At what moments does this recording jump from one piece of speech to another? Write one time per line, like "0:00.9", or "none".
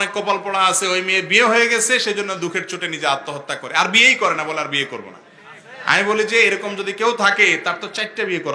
none